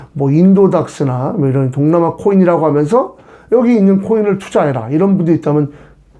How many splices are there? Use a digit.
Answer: 0